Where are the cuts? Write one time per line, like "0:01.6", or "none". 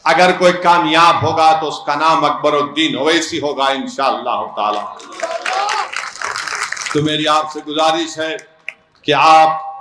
none